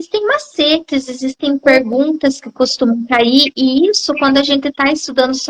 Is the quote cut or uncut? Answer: uncut